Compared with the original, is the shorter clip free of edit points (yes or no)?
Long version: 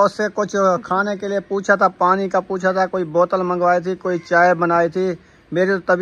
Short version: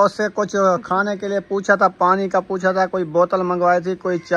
yes